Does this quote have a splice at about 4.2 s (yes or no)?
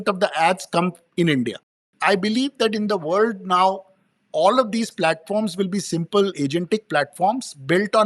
no